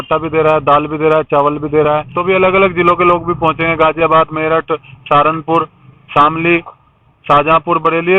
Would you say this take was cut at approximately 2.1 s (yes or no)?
yes